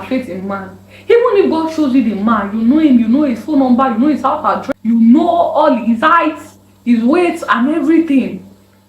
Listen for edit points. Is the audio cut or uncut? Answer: cut